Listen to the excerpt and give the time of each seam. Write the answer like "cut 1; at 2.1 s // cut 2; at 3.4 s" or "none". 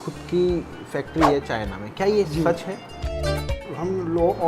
cut 1; at 3.3 s